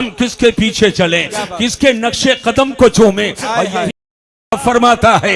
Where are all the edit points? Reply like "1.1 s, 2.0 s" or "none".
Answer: 3.9 s